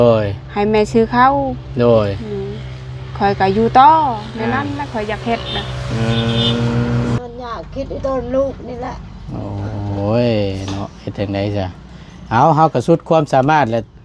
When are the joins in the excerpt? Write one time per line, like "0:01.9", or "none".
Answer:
0:07.2